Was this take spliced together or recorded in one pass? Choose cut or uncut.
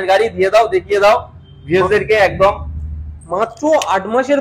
uncut